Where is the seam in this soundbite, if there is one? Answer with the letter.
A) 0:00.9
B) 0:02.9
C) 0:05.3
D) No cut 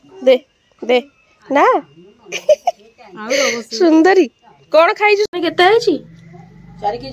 C